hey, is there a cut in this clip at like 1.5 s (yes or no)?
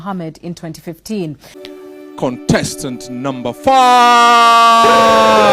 yes